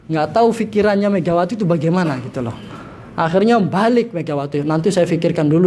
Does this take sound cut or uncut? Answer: uncut